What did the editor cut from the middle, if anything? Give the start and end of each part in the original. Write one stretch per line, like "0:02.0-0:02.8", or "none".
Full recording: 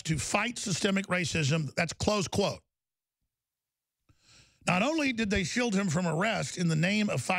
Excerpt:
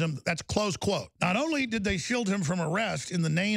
0:02.6-0:04.6